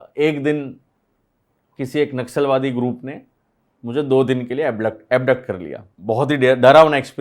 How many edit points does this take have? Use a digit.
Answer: 1